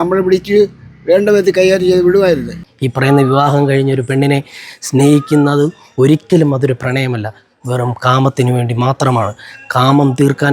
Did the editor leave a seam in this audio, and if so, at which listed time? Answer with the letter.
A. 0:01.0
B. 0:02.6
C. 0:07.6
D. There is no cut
B